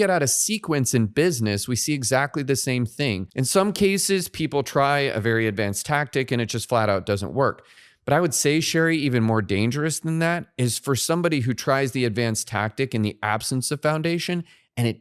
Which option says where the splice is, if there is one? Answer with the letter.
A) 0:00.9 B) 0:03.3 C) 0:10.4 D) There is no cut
B